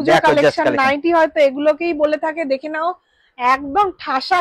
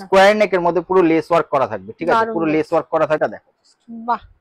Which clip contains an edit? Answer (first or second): second